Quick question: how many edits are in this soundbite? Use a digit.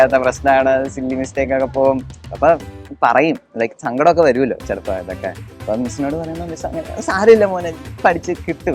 0